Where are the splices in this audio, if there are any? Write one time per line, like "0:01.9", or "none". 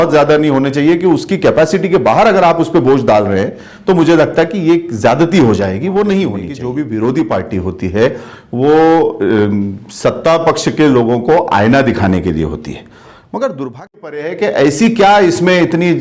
0:06.5
0:14.3